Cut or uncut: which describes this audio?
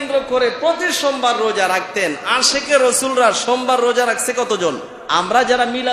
cut